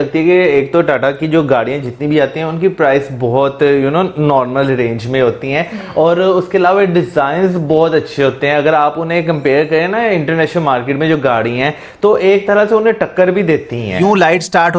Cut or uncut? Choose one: cut